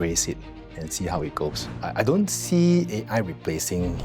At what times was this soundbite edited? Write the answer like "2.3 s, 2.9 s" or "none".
1.7 s

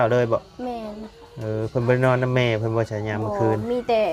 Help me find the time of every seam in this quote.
none

